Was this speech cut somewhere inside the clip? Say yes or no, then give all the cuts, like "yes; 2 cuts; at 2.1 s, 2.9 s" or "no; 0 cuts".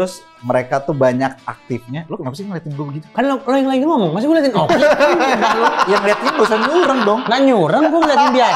no; 0 cuts